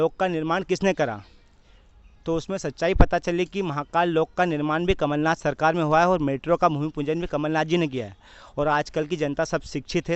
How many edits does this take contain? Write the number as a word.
zero